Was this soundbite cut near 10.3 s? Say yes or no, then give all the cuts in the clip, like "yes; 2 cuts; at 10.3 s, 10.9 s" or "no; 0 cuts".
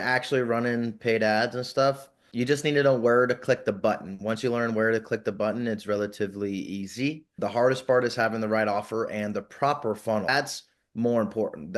yes; 1 cut; at 10.3 s